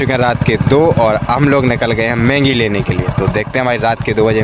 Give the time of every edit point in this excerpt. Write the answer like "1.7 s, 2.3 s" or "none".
none